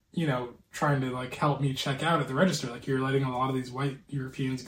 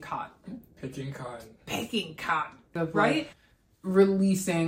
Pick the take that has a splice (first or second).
second